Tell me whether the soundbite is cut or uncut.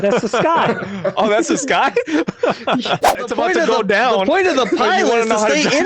cut